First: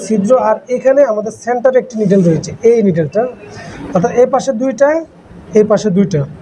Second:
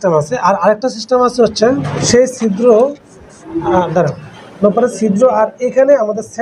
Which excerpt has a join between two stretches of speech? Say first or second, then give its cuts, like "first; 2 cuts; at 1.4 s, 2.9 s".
second; 1 cut; at 1.9 s